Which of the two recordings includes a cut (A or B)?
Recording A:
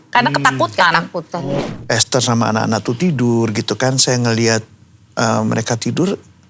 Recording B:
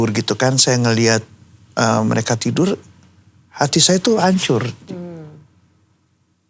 A